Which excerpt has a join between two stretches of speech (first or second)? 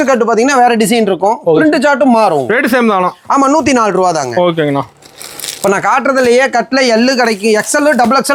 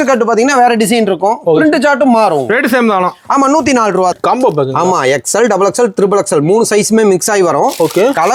second